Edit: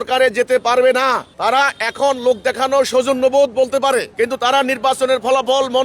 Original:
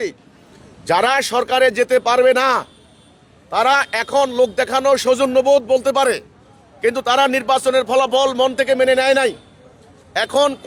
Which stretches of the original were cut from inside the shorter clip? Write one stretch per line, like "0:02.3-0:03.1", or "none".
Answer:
0:02.7-0:03.4
0:06.2-0:06.7